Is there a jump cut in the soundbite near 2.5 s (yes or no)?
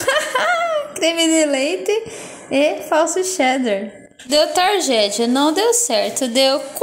no